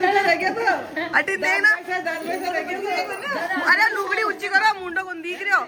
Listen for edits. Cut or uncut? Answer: uncut